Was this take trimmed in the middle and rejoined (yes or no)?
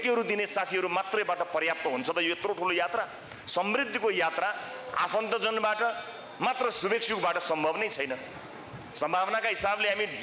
no